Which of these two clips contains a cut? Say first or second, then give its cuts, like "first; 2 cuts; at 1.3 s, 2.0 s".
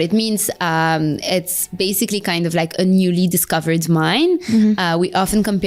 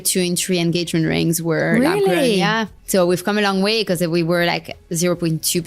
second; 1 cut; at 2.7 s